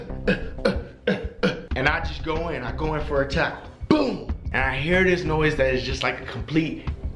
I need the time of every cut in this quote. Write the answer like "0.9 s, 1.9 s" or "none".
1.6 s, 4.4 s